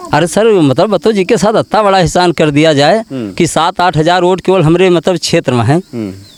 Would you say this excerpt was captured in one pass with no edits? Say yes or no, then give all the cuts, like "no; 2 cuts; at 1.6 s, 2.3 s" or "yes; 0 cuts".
yes; 0 cuts